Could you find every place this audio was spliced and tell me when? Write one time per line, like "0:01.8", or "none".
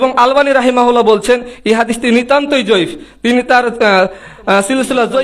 none